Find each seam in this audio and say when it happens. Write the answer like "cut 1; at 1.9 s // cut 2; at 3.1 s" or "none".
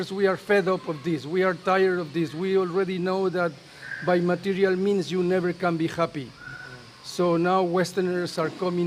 none